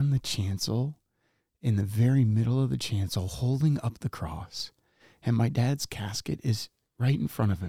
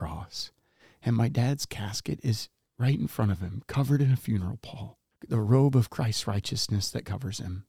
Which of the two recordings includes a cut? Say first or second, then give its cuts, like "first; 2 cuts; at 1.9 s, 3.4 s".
second; 1 cut; at 5.0 s